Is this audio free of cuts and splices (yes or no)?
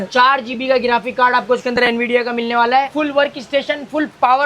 no